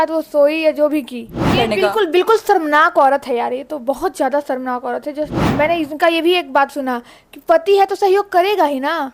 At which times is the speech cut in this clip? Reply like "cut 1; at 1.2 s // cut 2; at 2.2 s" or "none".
cut 1; at 1.5 s // cut 2; at 5.4 s